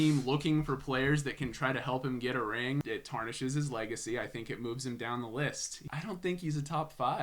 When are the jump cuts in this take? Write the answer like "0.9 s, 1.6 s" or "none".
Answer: 2.8 s, 5.8 s